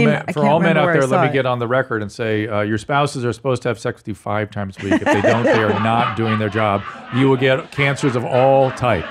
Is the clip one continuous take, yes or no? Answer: yes